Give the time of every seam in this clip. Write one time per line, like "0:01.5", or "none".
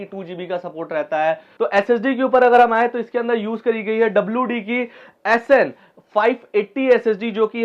0:01.5